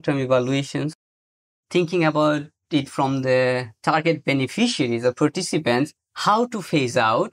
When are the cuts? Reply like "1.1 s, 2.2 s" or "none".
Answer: 1.2 s

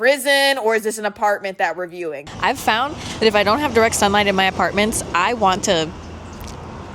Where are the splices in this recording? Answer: 2.3 s

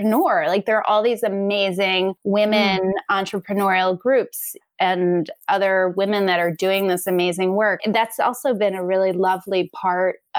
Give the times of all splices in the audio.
2.2 s, 7.8 s

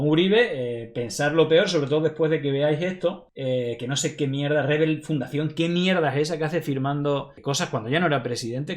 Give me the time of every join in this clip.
3.3 s, 7.3 s

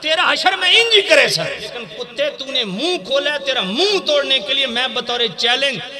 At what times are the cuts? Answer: 2.0 s

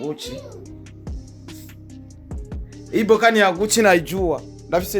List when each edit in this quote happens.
1.0 s, 2.9 s

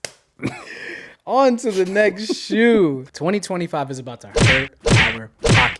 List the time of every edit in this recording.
3.0 s

